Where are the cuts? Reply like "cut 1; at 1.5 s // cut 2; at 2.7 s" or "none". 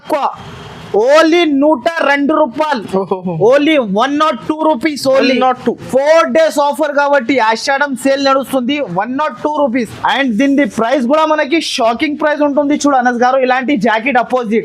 cut 1; at 9.9 s

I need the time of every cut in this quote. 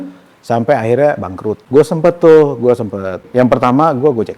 cut 1; at 1.6 s // cut 2; at 3.3 s

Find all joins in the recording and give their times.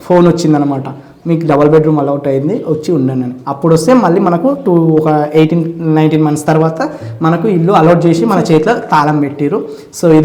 none

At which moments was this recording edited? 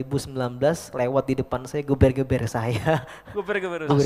none

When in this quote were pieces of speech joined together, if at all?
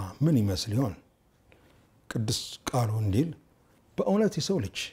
none

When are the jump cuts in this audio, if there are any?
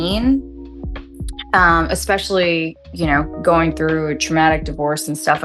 none

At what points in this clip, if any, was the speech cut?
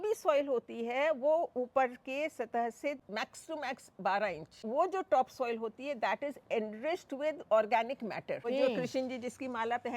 cut 1; at 3.0 s // cut 2; at 4.6 s // cut 3; at 8.4 s

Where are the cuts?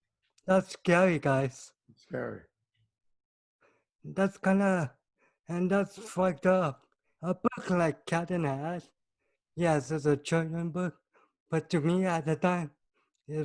cut 1; at 7.1 s

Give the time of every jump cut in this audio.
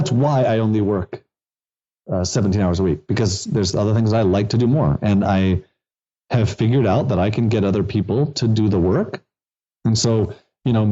none

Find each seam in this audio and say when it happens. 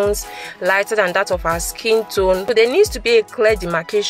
cut 1; at 2.4 s

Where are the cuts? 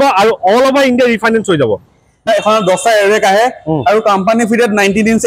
cut 1; at 2.3 s

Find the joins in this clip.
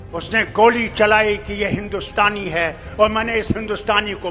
none

